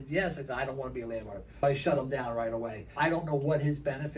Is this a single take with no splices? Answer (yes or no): no